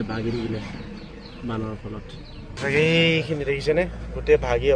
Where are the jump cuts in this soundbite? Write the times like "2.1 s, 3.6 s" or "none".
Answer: 2.5 s